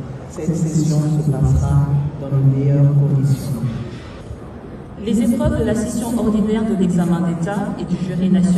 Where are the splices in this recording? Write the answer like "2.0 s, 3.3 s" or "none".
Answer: 4.2 s